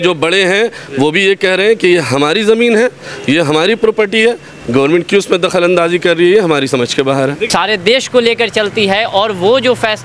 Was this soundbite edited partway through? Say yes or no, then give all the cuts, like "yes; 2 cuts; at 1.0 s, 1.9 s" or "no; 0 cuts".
yes; 1 cut; at 7.5 s